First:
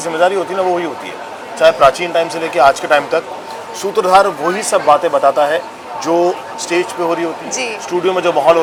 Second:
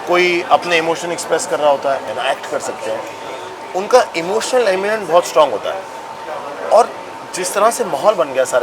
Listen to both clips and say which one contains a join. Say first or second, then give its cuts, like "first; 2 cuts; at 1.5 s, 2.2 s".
second; 1 cut; at 2.1 s